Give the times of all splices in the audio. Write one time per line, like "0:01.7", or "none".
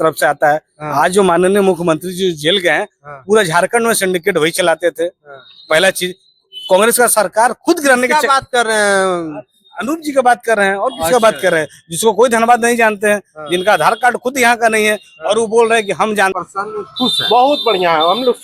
0:16.4